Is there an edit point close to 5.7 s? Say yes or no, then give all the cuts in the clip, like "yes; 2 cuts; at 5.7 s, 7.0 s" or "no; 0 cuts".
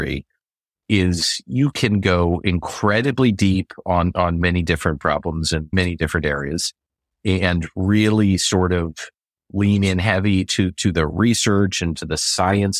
yes; 2 cuts; at 4.4 s, 5.7 s